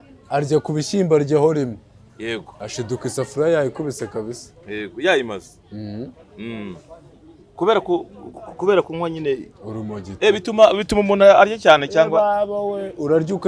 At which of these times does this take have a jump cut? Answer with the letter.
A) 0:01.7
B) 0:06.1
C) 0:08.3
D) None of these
D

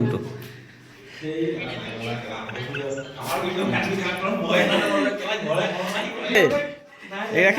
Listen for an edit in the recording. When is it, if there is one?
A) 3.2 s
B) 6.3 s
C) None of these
B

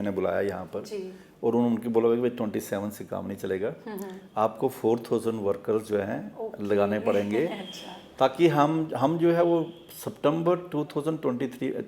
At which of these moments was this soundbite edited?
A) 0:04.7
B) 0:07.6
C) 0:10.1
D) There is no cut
D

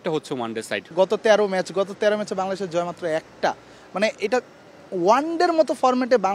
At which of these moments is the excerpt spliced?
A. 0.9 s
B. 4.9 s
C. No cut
A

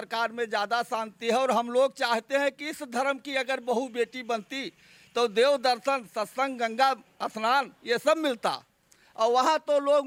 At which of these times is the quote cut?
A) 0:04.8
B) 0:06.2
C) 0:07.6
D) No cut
D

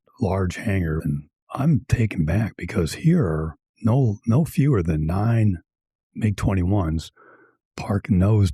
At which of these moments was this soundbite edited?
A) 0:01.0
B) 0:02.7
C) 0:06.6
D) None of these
A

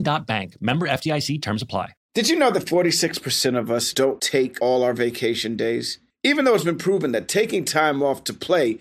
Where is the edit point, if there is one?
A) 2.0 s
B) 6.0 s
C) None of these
A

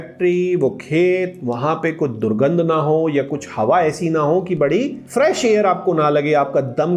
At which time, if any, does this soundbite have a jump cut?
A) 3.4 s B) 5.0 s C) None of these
B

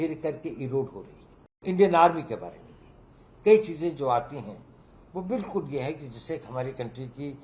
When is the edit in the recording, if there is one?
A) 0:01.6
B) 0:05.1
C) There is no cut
A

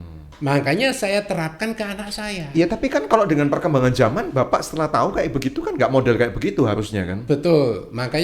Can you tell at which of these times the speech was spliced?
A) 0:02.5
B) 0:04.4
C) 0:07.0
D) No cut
D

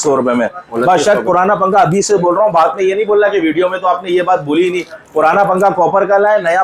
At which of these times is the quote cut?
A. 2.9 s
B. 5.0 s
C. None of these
C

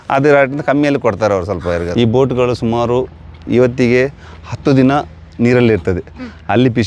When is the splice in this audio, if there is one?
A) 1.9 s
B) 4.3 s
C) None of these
A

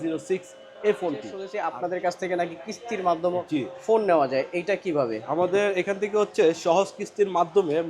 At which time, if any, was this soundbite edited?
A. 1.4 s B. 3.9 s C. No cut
A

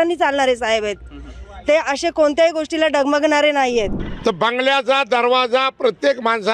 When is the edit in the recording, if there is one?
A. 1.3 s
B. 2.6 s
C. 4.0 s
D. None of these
C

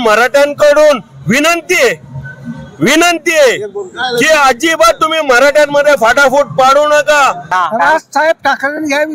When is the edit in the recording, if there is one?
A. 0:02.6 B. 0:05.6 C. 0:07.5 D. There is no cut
C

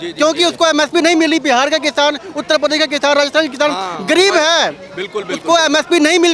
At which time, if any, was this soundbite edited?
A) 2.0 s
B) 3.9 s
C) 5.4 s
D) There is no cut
D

